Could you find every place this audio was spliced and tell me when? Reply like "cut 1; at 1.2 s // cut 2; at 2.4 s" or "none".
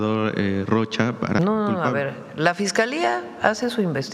cut 1; at 1.4 s